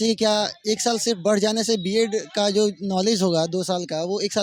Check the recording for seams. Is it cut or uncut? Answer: uncut